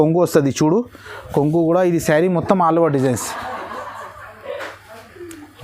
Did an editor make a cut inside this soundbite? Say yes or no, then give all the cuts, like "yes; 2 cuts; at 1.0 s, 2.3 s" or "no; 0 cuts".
no; 0 cuts